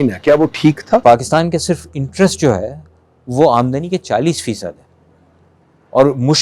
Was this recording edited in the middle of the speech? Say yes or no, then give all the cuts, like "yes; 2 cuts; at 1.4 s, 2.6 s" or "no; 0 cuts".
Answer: yes; 1 cut; at 1.0 s